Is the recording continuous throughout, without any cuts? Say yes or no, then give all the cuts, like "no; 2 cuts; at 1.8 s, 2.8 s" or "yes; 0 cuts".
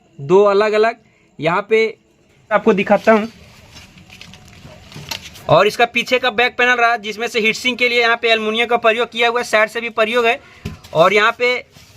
no; 1 cut; at 2.5 s